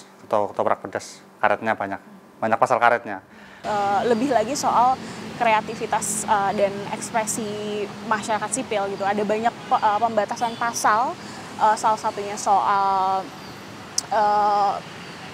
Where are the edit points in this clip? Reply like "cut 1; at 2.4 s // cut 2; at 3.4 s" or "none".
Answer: cut 1; at 3.6 s